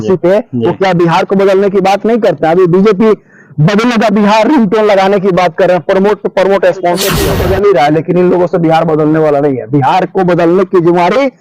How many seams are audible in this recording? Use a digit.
1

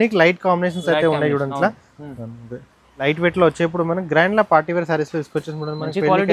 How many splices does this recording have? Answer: 1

